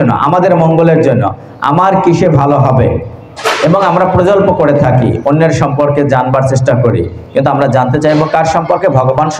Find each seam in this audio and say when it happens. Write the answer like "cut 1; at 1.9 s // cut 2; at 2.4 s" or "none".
none